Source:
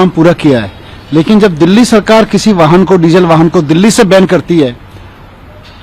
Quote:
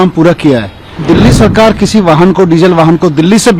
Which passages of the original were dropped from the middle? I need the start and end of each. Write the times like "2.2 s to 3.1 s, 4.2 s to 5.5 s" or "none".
1.0 s to 1.5 s